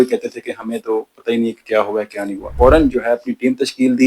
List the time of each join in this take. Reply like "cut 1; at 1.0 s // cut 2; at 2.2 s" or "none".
cut 1; at 2.5 s

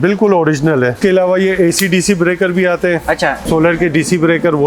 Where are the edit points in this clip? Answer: cut 1; at 1.0 s // cut 2; at 3.4 s

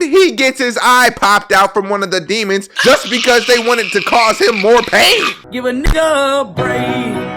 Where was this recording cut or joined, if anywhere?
cut 1; at 5.4 s

